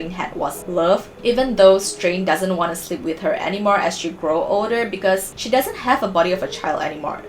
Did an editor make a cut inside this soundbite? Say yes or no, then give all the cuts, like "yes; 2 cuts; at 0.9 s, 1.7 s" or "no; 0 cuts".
yes; 2 cuts; at 0.9 s, 5.3 s